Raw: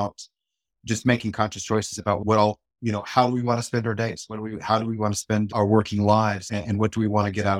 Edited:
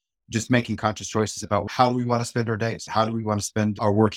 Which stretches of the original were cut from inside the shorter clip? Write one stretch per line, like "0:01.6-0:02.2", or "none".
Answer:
0:02.2-0:03.0
0:04.2-0:04.6